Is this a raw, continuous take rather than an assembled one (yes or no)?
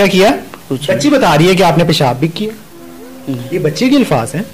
yes